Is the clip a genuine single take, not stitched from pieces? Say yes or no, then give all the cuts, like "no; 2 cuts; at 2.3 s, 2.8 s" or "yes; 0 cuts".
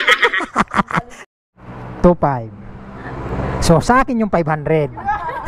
no; 1 cut; at 1.2 s